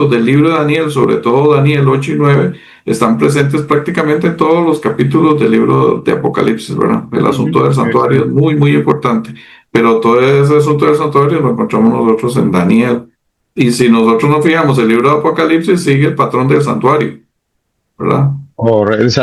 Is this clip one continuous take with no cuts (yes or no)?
yes